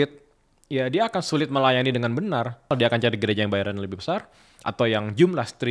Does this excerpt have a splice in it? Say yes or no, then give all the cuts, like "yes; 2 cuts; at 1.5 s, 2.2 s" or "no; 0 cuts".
yes; 1 cut; at 2.7 s